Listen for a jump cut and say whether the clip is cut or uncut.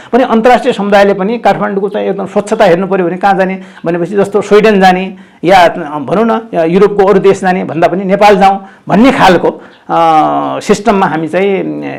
uncut